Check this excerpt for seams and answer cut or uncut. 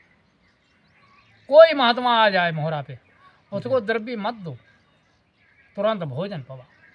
uncut